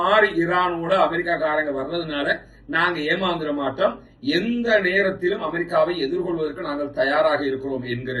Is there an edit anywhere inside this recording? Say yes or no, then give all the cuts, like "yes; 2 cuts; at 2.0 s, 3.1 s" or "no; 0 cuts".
no; 0 cuts